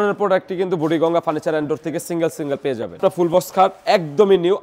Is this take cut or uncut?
cut